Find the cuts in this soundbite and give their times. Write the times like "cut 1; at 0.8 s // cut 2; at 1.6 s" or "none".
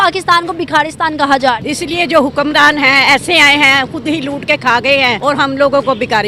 cut 1; at 1.6 s // cut 2; at 5.2 s